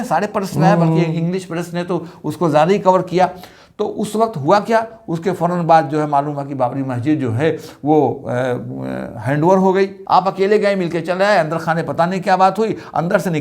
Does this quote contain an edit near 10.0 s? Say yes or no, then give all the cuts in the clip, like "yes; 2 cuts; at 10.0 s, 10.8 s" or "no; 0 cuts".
yes; 1 cut; at 10.0 s